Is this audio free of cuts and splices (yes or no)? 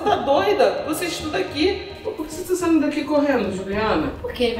no